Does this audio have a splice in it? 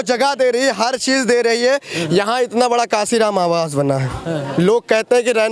no; 0 cuts

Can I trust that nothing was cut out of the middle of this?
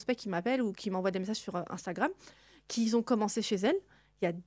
yes; 0 cuts

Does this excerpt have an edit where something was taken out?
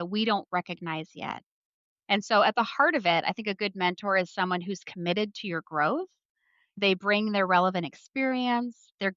no; 0 cuts

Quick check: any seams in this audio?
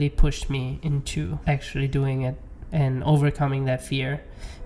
no; 0 cuts

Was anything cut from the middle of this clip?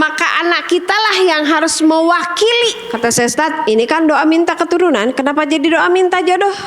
yes; 1 cut; at 2.9 s

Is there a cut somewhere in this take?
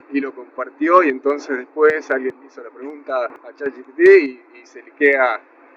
yes; 1 cut; at 3.6 s

